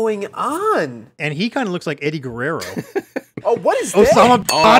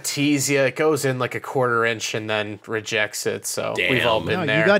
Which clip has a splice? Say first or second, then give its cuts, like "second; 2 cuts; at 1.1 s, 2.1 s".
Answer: first; 1 cut; at 1.1 s